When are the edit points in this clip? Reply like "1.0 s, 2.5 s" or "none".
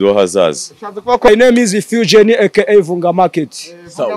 1.3 s